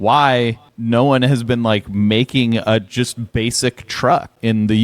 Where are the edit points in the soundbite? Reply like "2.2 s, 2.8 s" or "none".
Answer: none